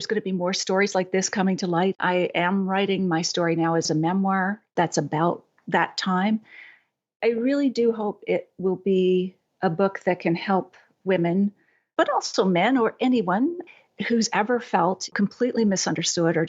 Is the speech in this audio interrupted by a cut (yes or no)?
yes